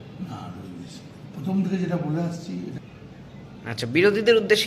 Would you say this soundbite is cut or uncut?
cut